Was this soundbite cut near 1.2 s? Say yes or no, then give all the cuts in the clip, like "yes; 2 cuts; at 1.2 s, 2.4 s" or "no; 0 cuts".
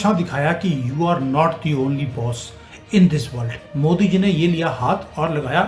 no; 1 cut; at 3.6 s